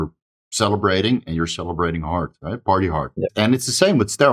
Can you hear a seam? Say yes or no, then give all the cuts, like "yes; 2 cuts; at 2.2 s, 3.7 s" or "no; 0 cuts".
yes; 1 cut; at 3.3 s